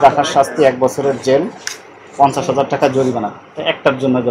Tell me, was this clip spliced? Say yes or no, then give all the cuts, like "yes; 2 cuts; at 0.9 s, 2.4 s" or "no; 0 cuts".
no; 0 cuts